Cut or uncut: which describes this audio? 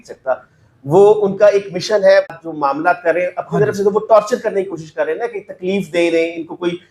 cut